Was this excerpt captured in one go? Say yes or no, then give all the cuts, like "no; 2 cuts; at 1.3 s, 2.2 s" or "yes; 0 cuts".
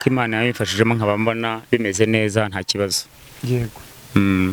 yes; 0 cuts